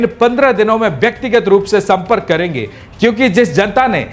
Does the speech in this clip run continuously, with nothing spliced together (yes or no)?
no